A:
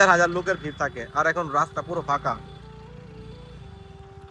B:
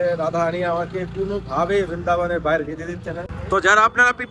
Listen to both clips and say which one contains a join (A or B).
B